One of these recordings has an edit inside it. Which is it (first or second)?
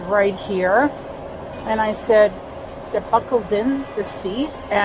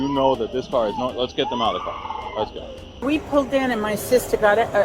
second